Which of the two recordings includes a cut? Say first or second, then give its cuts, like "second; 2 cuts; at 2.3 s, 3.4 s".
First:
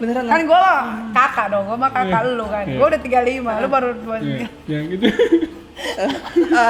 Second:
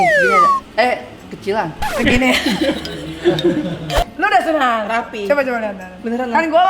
second; 1 cut; at 4.0 s